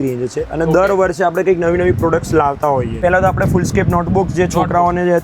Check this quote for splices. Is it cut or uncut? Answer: cut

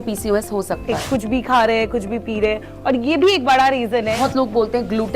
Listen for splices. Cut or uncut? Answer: cut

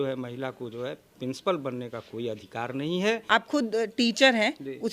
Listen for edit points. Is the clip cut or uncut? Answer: cut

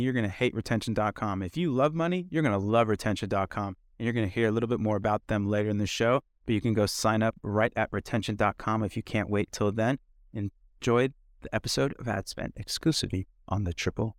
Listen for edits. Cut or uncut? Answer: uncut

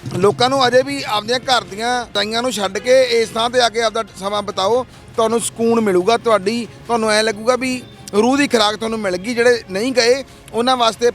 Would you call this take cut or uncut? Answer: cut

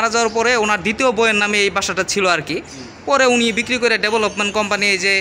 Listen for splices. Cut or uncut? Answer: uncut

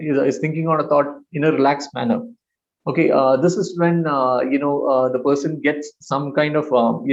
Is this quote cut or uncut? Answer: uncut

